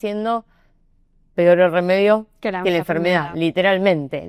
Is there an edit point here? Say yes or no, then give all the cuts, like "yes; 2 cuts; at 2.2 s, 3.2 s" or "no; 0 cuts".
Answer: no; 0 cuts